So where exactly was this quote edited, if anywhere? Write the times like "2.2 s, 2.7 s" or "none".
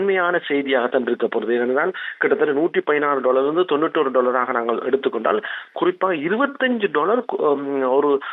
none